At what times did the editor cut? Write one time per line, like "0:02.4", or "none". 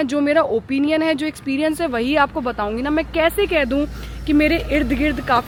none